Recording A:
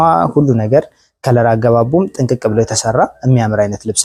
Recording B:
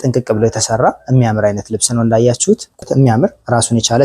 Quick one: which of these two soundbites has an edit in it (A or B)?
B